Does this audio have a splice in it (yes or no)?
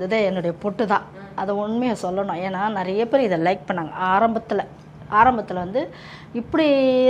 no